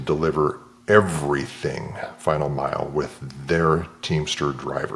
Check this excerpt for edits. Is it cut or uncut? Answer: uncut